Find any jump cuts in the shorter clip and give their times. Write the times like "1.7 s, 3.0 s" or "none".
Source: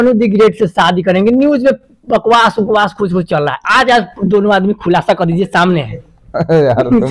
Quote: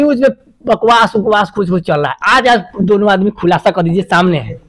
none